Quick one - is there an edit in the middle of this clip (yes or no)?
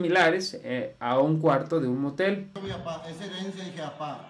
yes